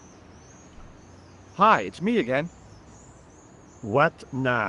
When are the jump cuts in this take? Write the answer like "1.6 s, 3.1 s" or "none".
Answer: 1.5 s